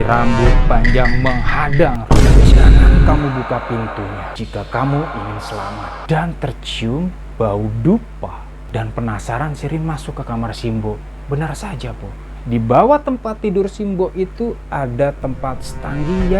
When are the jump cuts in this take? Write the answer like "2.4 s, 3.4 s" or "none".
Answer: 5.9 s

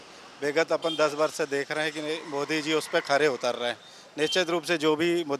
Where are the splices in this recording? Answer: none

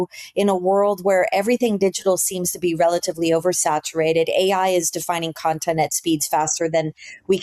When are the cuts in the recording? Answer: none

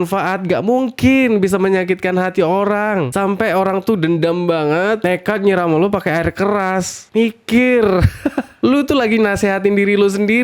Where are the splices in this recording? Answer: none

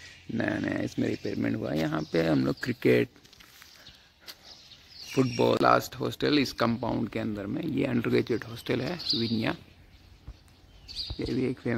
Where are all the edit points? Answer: 5.6 s

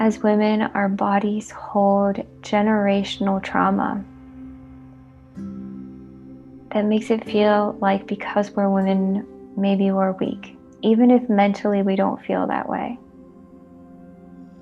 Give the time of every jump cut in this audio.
4.2 s, 6.6 s

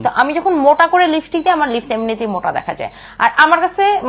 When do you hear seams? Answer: none

